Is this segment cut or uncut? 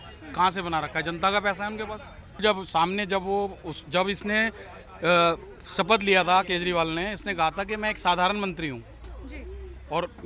cut